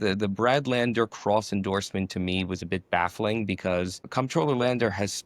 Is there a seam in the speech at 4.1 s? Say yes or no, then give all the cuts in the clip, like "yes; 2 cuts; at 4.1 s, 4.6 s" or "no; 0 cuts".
yes; 1 cut; at 4.1 s